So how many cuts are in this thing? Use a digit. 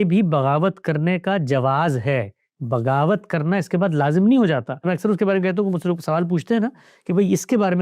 1